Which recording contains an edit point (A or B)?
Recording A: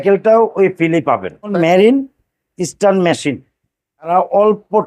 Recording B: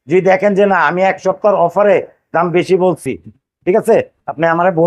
A